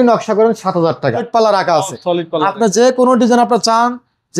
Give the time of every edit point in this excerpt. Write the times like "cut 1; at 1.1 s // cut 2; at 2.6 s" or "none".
cut 1; at 1.3 s